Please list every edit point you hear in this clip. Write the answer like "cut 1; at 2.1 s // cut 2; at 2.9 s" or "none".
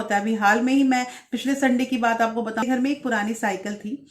cut 1; at 2.6 s